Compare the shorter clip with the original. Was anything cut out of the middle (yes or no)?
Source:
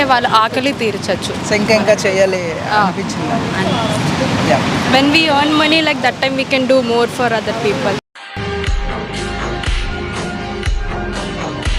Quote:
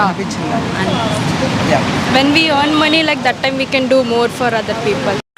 no